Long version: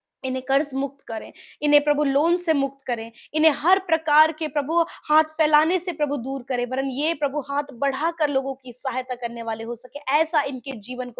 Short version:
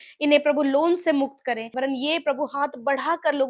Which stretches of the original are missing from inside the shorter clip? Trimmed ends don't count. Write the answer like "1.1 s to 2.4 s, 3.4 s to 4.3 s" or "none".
3.1 s to 6.7 s